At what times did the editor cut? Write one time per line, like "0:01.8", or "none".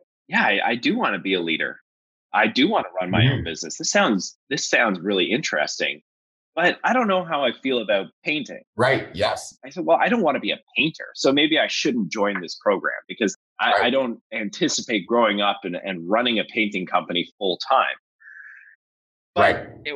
0:13.3